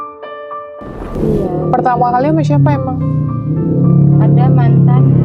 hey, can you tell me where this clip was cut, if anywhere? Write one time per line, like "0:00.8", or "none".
0:01.1